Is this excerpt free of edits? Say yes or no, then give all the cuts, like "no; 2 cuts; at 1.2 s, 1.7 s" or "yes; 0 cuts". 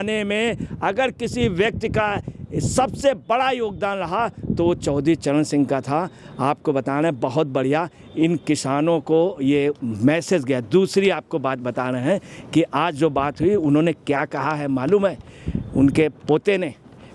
yes; 0 cuts